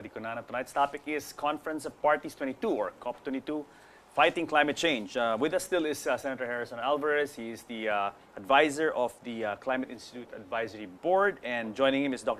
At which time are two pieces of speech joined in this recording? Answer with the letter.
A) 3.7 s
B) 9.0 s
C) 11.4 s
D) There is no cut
C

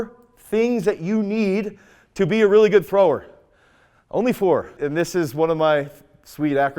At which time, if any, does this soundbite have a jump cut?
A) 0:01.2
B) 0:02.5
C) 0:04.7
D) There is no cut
C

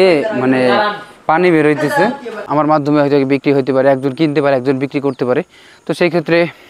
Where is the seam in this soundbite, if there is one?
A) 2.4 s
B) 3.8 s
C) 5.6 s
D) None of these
A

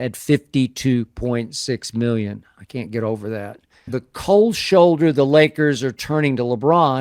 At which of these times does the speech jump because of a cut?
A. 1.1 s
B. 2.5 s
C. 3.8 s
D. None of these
C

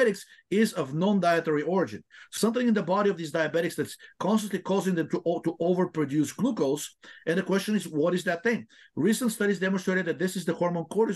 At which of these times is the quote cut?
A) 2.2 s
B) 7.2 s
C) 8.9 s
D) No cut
A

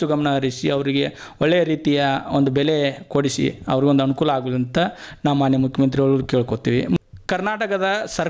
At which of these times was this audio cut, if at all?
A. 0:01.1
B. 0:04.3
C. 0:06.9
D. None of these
D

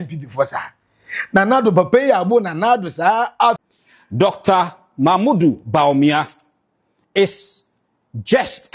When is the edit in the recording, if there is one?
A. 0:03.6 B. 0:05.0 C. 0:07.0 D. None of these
A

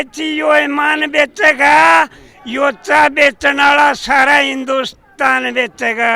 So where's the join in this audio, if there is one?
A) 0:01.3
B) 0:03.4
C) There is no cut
C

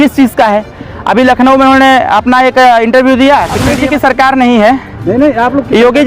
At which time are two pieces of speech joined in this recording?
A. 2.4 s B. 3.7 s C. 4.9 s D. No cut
B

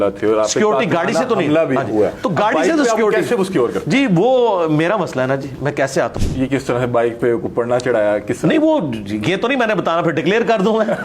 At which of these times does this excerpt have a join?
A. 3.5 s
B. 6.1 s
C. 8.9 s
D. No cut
B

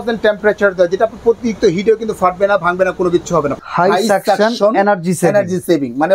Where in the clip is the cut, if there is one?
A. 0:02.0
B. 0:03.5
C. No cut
B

